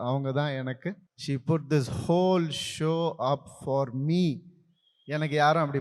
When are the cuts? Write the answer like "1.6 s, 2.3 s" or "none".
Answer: 1.1 s